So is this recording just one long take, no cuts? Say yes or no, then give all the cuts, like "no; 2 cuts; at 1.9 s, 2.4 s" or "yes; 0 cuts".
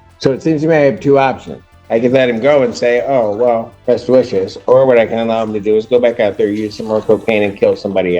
no; 1 cut; at 3.7 s